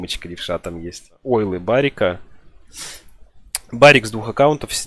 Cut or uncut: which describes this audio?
cut